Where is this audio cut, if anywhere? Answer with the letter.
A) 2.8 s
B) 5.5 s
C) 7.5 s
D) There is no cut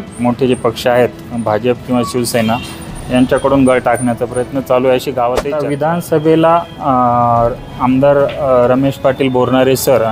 B